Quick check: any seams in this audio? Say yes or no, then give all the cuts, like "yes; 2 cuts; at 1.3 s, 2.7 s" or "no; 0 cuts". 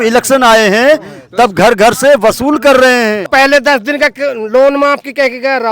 yes; 1 cut; at 3.2 s